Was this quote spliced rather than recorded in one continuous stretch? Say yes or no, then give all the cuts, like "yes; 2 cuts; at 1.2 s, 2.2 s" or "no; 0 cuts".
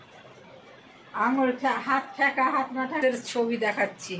yes; 1 cut; at 3.0 s